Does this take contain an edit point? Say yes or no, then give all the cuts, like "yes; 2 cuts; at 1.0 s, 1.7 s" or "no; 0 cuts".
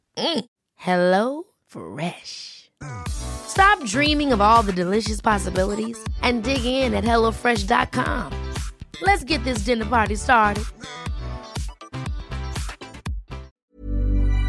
yes; 1 cut; at 13.5 s